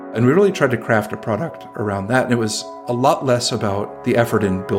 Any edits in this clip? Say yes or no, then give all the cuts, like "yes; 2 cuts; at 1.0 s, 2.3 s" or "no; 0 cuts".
no; 0 cuts